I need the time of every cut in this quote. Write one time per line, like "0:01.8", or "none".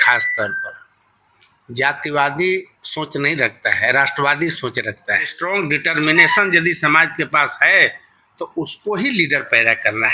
0:05.3